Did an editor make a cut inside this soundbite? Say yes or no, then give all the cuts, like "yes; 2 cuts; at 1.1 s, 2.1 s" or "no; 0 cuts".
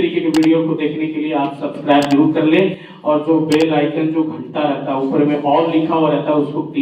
no; 0 cuts